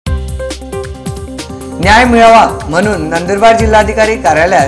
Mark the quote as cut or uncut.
cut